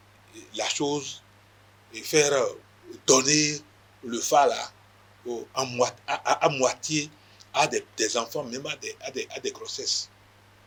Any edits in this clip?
no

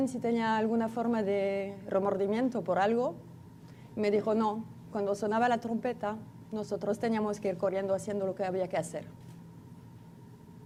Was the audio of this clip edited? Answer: no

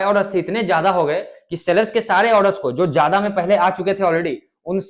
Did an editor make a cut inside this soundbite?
no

